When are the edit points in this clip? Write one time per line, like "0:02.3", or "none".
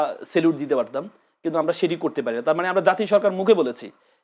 none